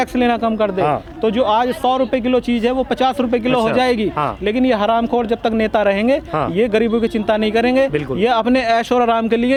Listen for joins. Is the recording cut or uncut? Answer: uncut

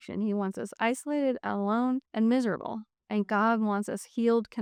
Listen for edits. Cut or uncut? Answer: uncut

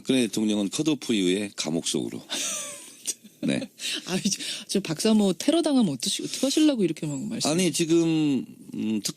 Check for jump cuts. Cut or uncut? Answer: cut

